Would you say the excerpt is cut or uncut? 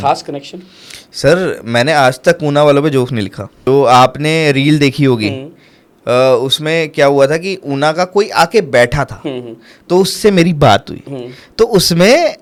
uncut